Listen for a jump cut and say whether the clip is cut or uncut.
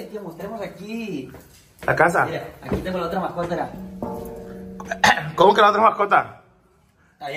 uncut